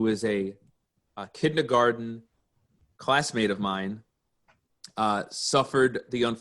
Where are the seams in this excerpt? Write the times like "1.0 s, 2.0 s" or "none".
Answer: 4.2 s